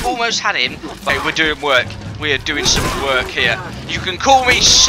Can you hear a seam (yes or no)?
yes